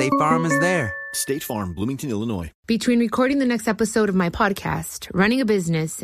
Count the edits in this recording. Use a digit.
1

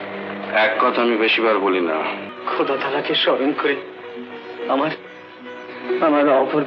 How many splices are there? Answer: 1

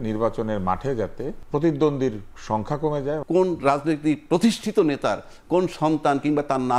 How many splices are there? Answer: 2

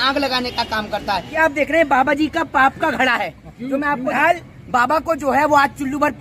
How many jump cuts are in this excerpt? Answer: 2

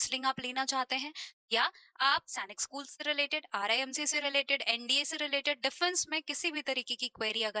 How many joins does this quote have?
0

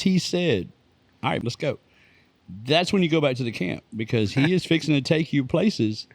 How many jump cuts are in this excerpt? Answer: 1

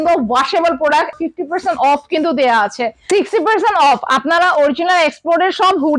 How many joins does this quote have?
2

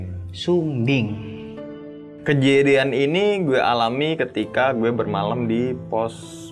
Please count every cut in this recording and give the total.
1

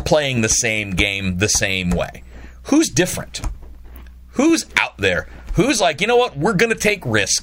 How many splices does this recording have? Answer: 0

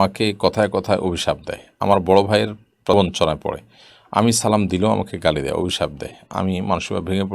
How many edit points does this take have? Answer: 1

